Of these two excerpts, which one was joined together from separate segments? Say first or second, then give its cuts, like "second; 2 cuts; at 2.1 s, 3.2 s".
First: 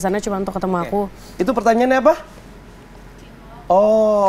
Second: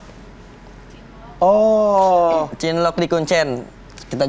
first; 1 cut; at 1.2 s